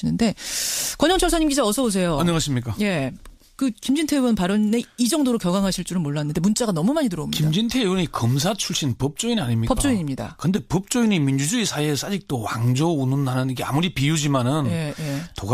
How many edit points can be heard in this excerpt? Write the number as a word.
one